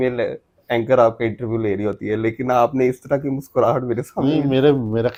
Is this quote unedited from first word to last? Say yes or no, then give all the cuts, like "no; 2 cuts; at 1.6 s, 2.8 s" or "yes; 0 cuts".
yes; 0 cuts